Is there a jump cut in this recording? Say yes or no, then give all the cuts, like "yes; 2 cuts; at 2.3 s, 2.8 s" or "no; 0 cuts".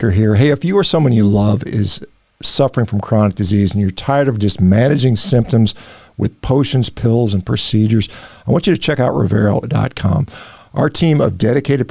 no; 0 cuts